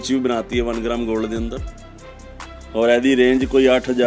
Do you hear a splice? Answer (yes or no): no